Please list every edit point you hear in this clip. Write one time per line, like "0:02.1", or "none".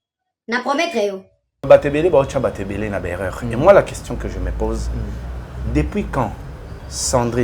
0:01.7